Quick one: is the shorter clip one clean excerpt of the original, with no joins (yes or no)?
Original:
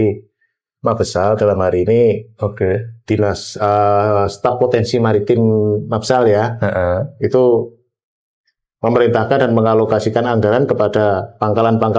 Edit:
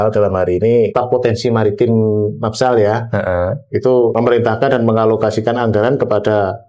no